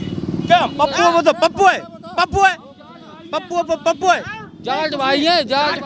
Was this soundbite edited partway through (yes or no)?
no